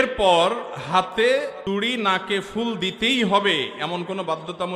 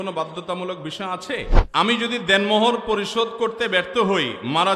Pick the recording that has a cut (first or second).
second